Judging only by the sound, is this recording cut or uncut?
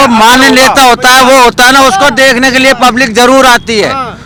uncut